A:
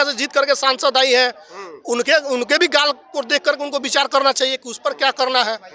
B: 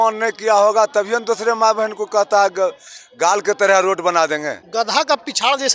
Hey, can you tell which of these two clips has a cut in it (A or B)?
B